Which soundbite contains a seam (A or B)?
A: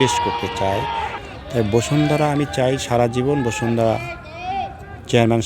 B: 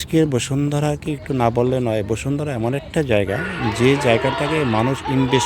A